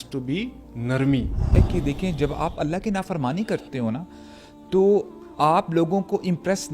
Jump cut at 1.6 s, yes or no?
yes